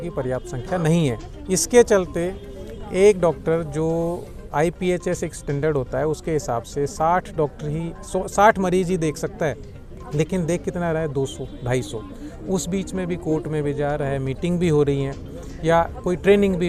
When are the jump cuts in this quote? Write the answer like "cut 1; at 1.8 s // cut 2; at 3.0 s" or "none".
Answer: none